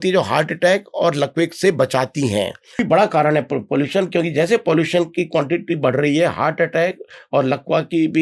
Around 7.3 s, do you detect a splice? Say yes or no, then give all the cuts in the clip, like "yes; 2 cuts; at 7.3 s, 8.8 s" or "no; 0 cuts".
no; 1 cut; at 2.7 s